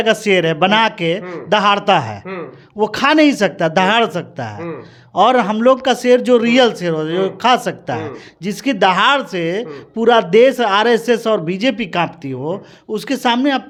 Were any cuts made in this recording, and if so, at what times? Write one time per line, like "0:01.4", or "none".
none